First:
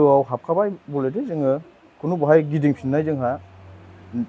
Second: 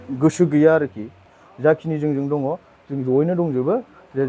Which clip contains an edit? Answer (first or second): second